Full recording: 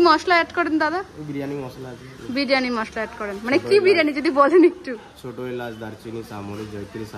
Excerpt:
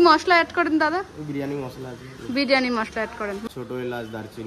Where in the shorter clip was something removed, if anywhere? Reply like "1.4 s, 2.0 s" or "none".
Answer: 3.3 s